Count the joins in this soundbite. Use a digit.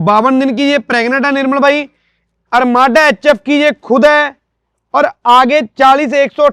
0